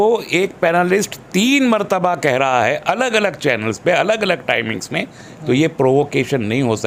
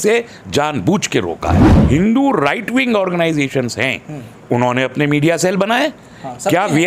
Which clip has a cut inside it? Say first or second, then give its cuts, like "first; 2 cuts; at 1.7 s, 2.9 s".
second; 1 cut; at 1.7 s